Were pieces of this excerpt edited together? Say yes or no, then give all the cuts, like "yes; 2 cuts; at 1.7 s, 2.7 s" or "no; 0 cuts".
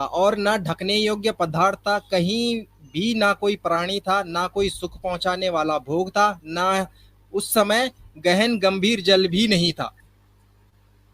no; 0 cuts